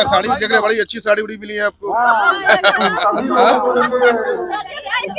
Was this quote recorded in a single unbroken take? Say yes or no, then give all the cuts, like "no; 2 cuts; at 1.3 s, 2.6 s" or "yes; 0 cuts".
yes; 0 cuts